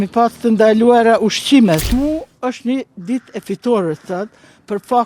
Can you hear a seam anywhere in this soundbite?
yes; 1 cut; at 1.9 s

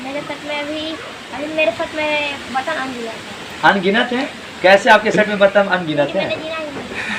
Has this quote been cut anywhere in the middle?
no; 0 cuts

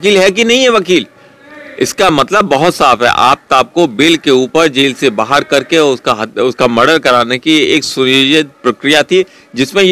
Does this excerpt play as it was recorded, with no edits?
yes; 0 cuts

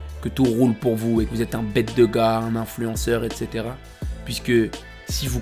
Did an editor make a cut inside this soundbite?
yes; 1 cut; at 1.3 s

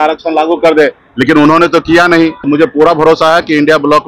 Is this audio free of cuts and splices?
no; 1 cut; at 2.4 s

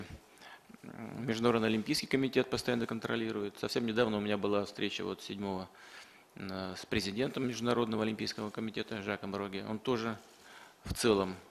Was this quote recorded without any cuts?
yes; 0 cuts

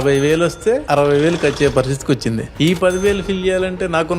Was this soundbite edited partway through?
yes; 2 cuts; at 0.8 s, 2.5 s

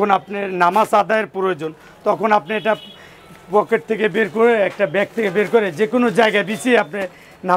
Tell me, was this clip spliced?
no; 0 cuts

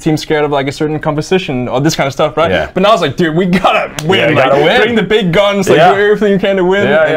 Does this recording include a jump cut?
no; 0 cuts

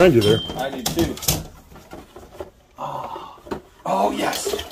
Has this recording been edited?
no; 0 cuts

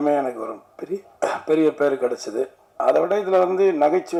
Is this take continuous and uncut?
yes; 0 cuts

